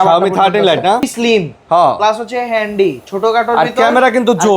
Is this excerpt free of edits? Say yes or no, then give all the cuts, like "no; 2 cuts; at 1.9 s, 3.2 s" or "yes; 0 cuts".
no; 1 cut; at 1.1 s